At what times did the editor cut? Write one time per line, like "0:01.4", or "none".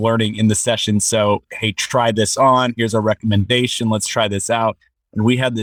none